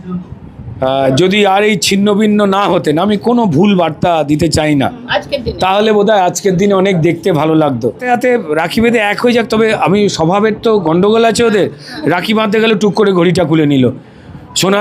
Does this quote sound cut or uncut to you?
cut